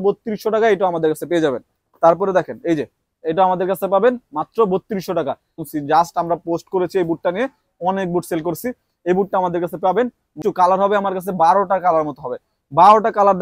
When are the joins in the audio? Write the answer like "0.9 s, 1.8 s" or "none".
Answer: 5.5 s, 10.4 s